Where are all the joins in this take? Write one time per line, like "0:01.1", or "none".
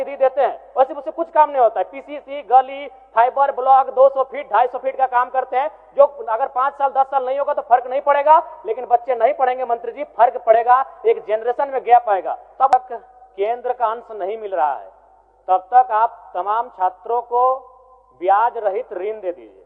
0:12.7